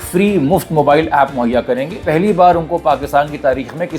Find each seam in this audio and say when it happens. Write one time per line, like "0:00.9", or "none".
0:02.0